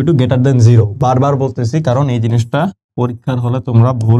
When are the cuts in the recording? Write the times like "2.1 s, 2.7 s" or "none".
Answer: none